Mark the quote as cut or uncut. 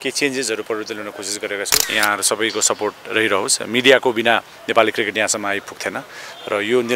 cut